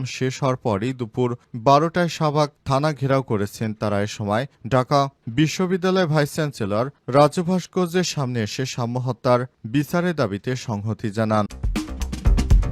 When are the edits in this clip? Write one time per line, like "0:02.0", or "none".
0:11.6